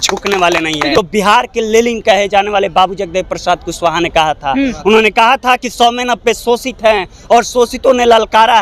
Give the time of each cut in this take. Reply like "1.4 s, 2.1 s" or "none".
1.0 s